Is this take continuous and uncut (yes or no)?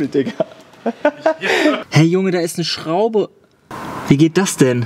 no